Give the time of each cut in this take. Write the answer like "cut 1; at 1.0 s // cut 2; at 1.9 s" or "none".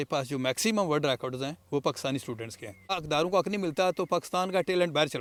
none